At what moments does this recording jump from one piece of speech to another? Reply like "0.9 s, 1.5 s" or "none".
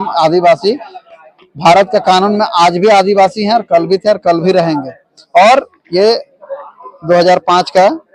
none